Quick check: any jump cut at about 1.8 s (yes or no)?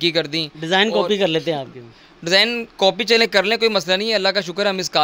no